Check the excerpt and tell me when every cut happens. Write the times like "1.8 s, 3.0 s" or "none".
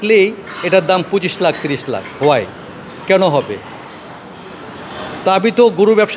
none